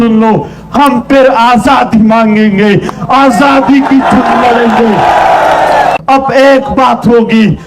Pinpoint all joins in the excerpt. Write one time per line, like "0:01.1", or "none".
0:06.0

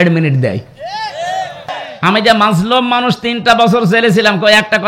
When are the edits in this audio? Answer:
0:01.6

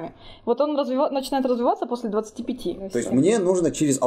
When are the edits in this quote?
0:02.9

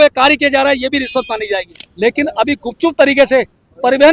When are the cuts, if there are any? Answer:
0:01.8

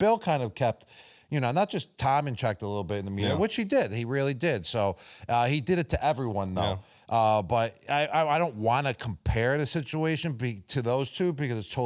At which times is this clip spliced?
none

